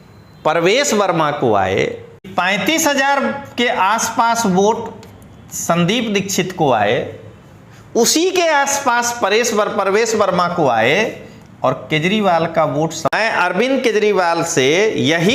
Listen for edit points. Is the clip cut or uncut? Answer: cut